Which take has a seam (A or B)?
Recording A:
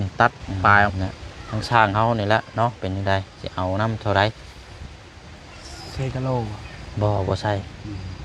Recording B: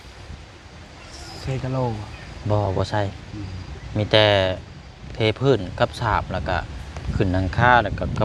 A